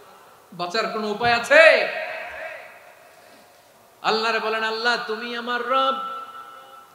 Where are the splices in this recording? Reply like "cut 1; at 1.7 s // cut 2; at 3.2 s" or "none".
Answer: cut 1; at 3.7 s

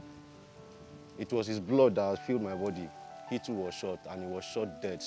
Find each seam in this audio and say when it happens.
none

